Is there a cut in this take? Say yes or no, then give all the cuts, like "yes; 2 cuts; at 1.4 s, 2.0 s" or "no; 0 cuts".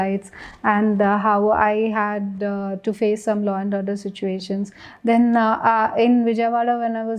no; 0 cuts